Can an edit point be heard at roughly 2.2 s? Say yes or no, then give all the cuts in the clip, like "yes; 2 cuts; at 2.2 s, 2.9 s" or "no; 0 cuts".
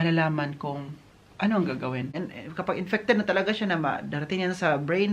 yes; 1 cut; at 2.2 s